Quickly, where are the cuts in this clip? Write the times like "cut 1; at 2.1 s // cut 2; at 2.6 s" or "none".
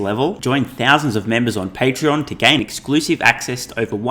none